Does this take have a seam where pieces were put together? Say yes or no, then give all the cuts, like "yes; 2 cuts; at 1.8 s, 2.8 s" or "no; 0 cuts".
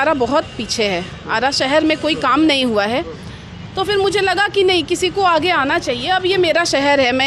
no; 0 cuts